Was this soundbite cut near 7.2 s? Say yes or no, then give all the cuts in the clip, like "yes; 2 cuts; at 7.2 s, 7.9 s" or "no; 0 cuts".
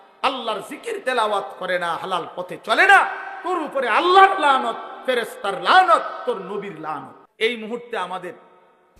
yes; 1 cut; at 7.2 s